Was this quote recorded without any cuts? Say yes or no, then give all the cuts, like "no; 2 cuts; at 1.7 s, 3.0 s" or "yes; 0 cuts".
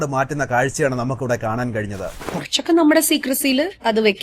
no; 1 cut; at 2.2 s